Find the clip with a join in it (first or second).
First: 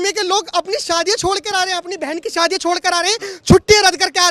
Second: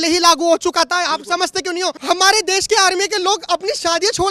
second